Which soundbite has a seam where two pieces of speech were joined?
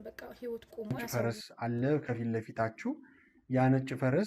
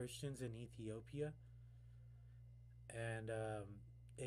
first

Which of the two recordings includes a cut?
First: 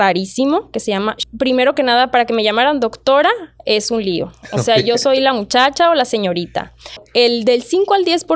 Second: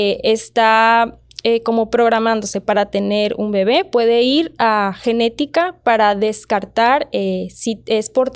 first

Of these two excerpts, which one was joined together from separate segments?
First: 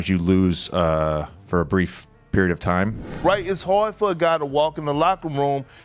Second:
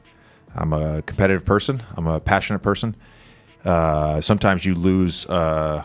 first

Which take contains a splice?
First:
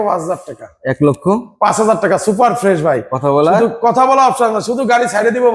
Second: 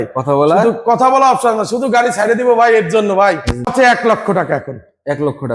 second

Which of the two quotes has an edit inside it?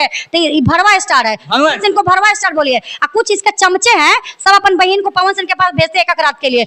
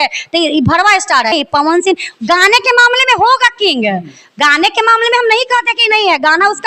second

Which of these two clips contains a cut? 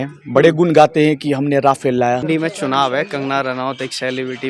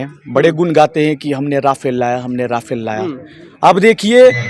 first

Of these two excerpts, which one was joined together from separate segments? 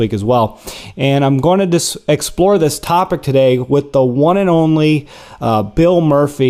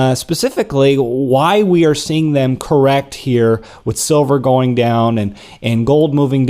second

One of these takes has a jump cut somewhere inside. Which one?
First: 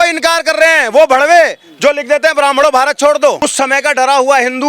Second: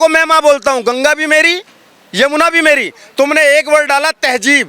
first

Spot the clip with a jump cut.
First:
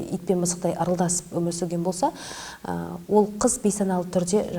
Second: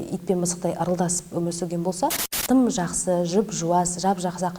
second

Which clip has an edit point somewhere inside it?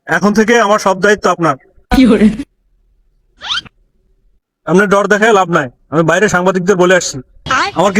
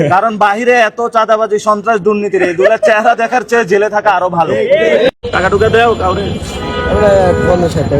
second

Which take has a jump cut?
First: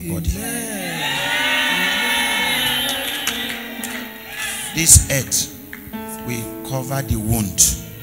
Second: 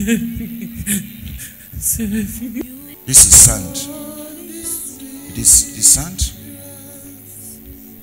second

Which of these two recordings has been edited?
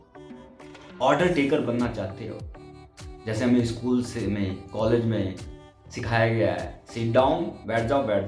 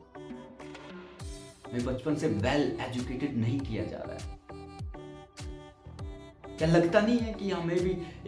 first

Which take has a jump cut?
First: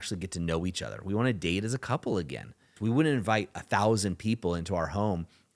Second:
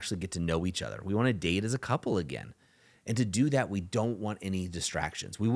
first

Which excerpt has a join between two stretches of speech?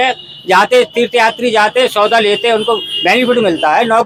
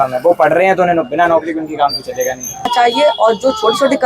second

